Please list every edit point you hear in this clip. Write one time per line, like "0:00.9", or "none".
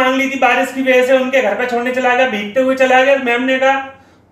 none